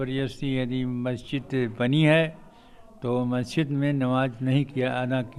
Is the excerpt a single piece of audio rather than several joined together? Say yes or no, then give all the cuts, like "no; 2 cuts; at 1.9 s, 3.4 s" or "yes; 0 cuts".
yes; 0 cuts